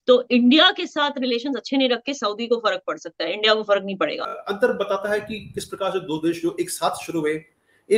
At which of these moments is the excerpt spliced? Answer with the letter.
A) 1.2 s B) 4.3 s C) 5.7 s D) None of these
B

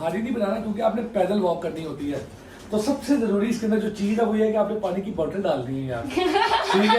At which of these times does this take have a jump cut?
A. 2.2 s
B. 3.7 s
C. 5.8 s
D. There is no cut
D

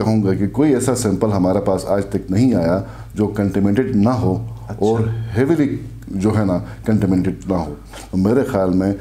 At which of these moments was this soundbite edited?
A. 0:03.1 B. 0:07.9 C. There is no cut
B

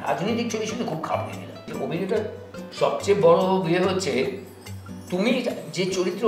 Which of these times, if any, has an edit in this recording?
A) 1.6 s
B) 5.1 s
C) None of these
A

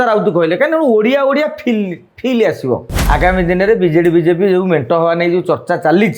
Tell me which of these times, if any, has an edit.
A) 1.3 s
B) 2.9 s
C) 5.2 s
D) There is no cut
B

